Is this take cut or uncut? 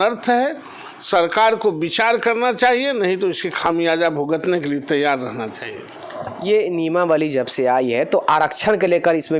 uncut